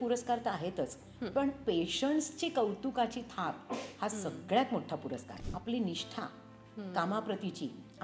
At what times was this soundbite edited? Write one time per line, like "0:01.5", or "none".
0:05.4